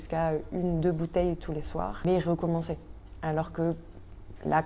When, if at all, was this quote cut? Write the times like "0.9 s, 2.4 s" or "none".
2.0 s